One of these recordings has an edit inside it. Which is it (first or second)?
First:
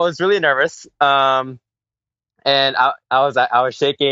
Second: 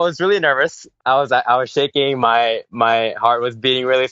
second